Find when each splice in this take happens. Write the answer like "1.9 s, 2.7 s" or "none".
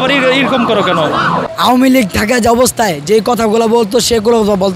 1.5 s